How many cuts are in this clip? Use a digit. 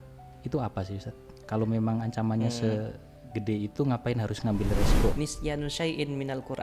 1